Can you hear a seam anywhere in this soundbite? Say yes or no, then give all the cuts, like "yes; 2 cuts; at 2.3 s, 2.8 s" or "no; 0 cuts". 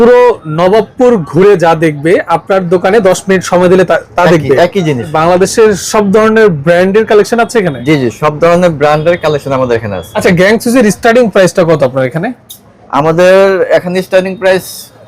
yes; 2 cuts; at 5.1 s, 10.1 s